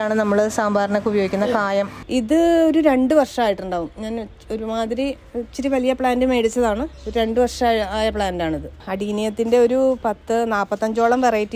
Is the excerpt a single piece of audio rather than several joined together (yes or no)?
no